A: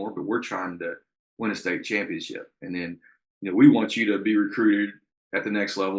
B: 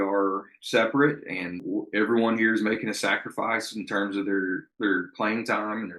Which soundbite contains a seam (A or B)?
B